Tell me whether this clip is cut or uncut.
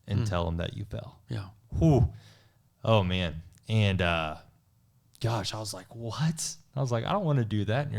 uncut